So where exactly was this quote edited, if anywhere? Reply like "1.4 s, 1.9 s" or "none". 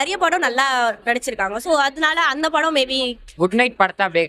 3.2 s